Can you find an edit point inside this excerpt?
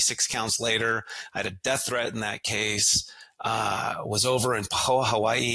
no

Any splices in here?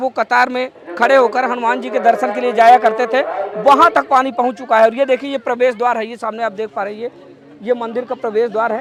no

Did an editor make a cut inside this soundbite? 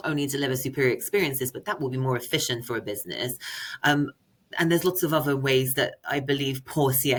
no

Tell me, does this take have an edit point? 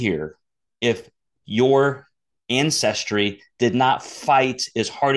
no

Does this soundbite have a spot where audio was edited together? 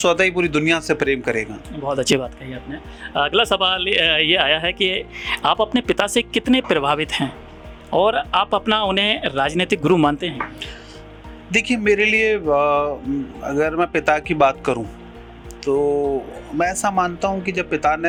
no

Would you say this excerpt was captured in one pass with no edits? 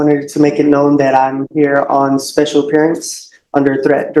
yes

